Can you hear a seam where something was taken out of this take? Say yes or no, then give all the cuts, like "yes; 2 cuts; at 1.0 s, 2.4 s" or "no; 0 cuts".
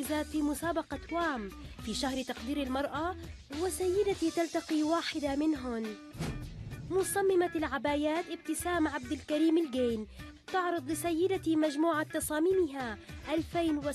yes; 1 cut; at 6.3 s